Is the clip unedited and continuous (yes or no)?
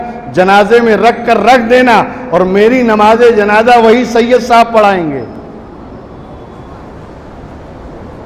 yes